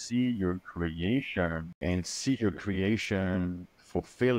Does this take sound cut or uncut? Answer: cut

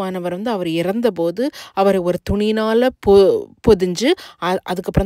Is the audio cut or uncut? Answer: uncut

